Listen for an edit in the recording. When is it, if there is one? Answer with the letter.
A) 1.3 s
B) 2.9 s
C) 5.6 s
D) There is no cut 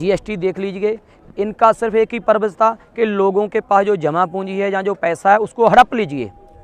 D